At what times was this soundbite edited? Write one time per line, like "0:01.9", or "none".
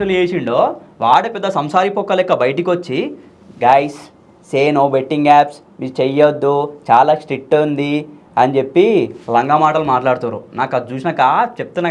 none

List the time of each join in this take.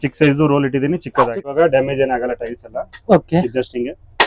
0:01.5

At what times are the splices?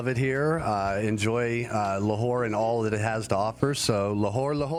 none

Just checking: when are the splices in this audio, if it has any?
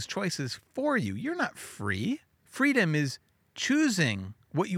0:02.4

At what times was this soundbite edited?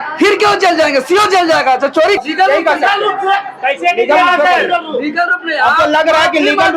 0:02.2

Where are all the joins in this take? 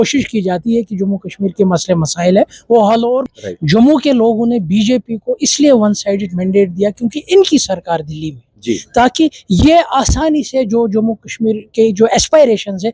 0:03.2

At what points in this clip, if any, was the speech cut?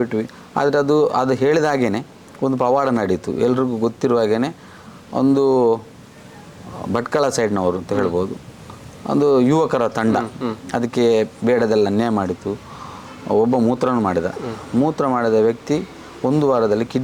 none

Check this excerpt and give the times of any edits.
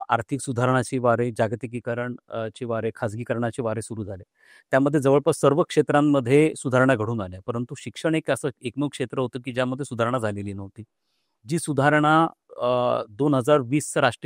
none

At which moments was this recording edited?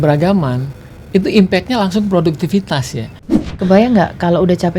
0:03.2

